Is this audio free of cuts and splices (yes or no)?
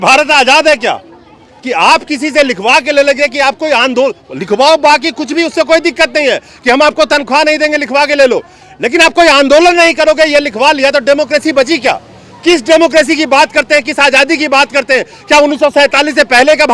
yes